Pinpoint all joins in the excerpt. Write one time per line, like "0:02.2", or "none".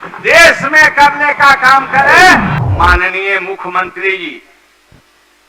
0:02.6